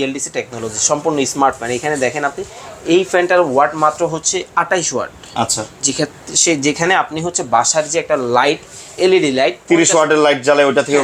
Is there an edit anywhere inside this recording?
no; 0 cuts

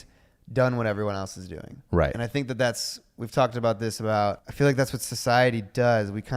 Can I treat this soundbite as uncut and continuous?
no; 1 cut; at 4.5 s

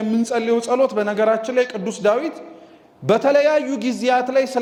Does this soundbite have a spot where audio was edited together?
no; 0 cuts

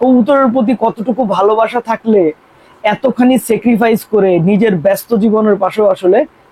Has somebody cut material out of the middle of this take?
no; 0 cuts

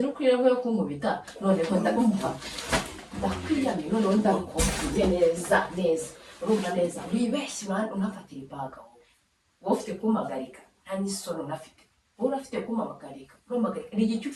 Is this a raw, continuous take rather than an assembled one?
yes; 0 cuts

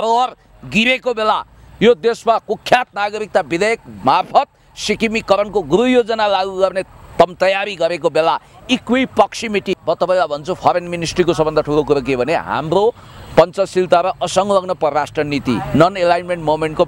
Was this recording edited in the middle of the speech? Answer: yes; 1 cut; at 9.8 s

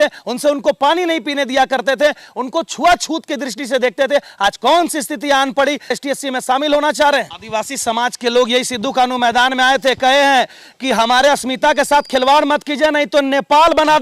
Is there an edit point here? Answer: yes; 2 cuts; at 6.0 s, 7.4 s

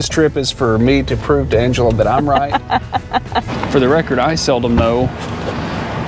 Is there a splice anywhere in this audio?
yes; 1 cut; at 3.5 s

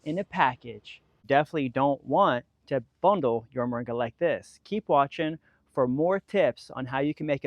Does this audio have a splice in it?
yes; 1 cut; at 1.2 s

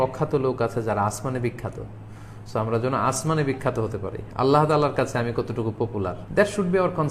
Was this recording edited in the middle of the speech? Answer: yes; 1 cut; at 6.2 s

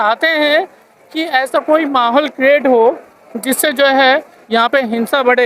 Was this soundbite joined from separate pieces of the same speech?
no; 0 cuts

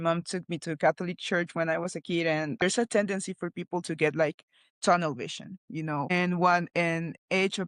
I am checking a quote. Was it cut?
yes; 1 cut; at 2.6 s

